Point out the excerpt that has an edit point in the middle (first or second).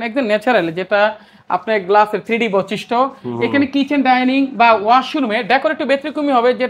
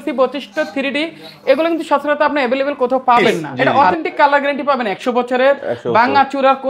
second